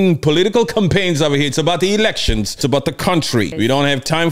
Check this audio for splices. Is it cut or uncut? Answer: cut